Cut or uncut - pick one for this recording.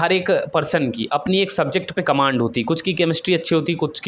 uncut